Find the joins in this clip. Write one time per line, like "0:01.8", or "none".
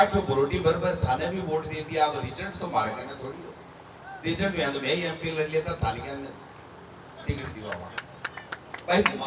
none